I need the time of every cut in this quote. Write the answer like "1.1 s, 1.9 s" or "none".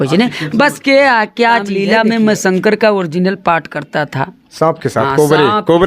1.7 s